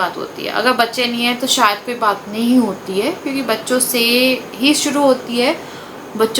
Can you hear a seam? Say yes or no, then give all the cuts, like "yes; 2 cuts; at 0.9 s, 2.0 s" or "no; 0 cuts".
no; 0 cuts